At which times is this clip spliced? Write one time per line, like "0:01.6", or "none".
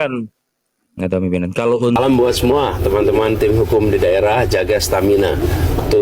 0:02.0